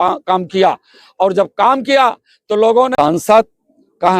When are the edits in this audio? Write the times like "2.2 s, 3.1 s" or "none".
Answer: 2.9 s